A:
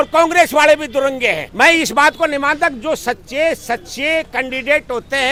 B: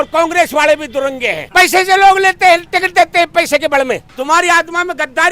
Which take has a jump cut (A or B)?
B